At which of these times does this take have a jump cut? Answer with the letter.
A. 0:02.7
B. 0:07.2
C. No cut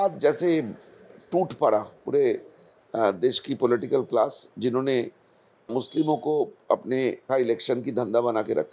B